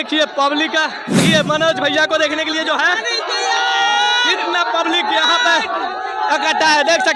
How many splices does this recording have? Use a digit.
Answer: 1